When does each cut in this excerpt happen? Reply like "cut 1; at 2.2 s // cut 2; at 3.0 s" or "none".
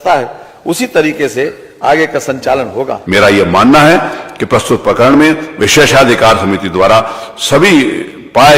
cut 1; at 3.0 s